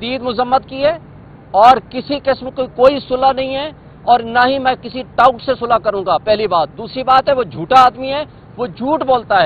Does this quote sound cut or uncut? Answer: uncut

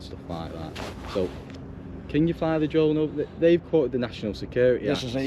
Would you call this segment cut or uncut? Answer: uncut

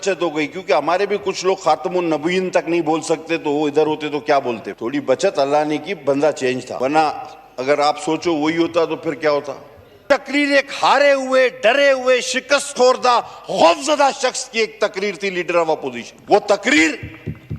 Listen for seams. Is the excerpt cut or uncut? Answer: cut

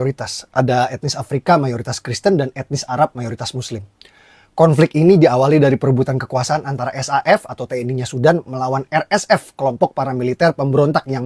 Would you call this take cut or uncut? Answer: cut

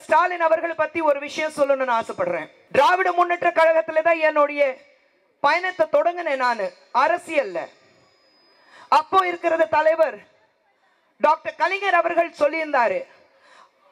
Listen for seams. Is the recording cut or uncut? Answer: cut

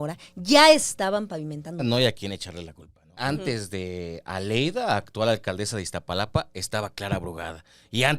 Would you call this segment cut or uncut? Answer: cut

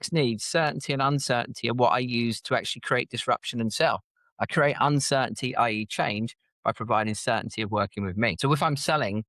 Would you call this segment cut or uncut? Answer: cut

